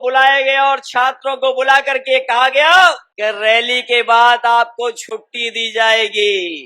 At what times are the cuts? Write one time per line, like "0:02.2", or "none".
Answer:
0:03.1

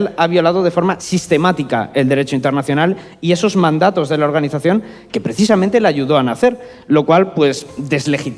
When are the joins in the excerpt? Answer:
none

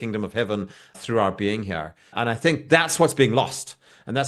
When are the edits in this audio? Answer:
0:01.0
0:02.1

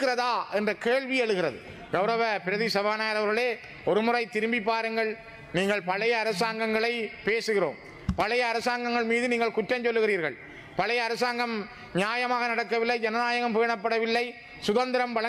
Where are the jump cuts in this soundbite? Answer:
none

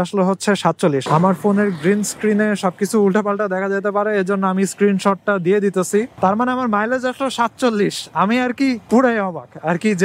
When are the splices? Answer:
0:06.1

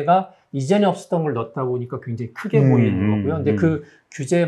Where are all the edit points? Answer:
none

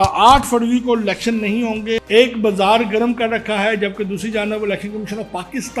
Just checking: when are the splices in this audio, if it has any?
0:02.0

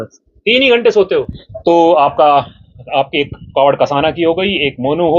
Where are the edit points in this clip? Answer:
none

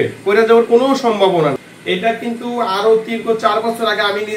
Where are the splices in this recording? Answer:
0:01.7

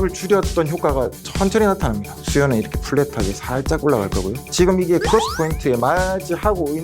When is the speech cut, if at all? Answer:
0:02.1
0:04.4

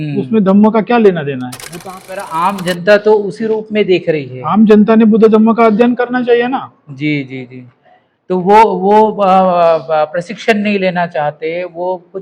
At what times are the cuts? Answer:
0:02.1

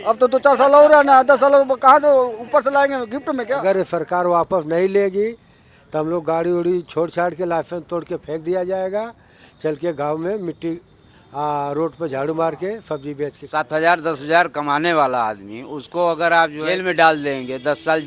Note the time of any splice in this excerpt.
0:03.5
0:13.4
0:16.6

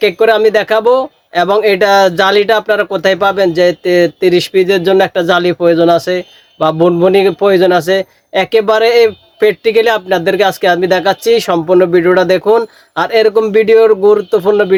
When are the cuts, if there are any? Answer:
none

